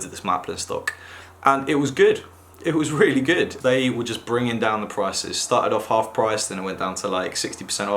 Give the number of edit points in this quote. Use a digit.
1